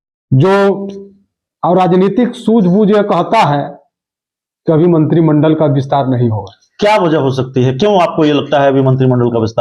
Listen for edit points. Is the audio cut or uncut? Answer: uncut